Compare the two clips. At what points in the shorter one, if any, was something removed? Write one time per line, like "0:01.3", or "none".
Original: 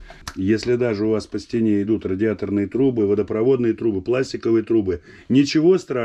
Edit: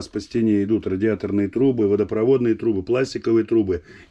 none